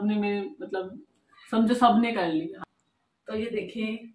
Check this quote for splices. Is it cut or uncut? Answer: cut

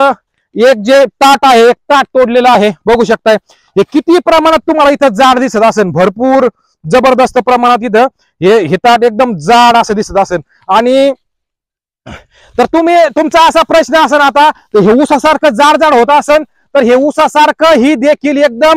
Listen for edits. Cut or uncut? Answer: uncut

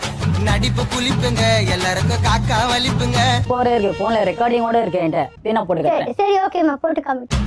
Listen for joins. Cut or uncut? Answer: uncut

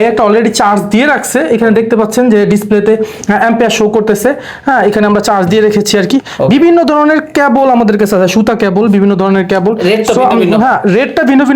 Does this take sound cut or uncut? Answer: uncut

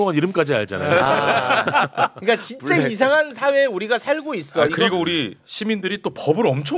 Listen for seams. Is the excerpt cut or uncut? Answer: uncut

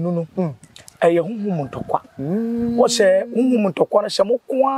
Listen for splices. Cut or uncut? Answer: uncut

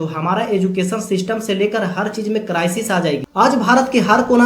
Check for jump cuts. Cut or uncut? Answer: cut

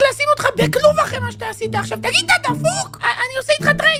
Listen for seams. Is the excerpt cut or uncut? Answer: uncut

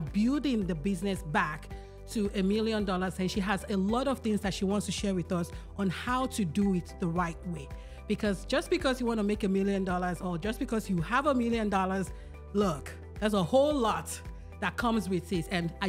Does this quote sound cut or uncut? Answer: uncut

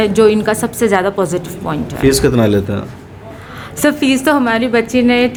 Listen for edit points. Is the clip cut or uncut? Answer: uncut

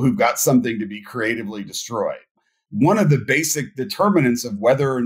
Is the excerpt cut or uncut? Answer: cut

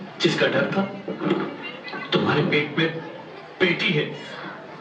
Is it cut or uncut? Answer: uncut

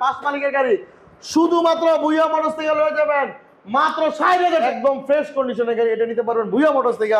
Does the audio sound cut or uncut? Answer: cut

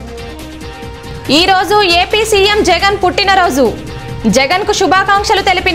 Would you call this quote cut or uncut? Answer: uncut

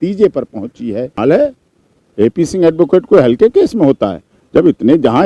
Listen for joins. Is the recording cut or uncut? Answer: cut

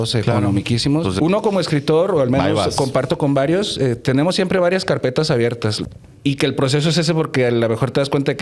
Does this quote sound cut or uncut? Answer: cut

